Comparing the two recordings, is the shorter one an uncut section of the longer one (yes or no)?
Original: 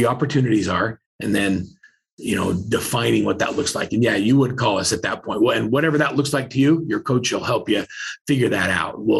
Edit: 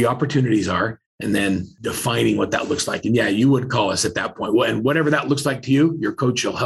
no